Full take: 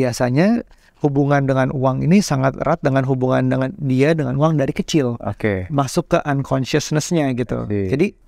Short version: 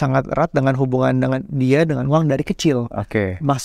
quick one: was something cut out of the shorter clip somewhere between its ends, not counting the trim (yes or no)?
no